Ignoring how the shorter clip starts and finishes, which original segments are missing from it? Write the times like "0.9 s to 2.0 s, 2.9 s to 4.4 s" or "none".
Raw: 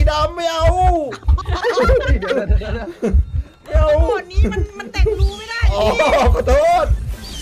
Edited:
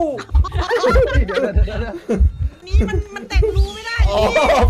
3.6 s to 4.3 s